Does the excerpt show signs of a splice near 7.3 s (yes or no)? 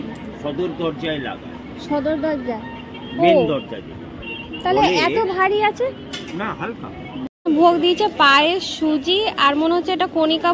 yes